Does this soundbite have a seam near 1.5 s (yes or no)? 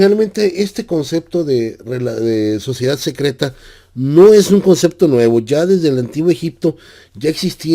yes